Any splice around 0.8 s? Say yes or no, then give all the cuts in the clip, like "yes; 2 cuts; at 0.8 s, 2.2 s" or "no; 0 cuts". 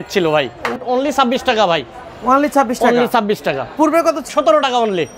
yes; 2 cuts; at 0.8 s, 4.3 s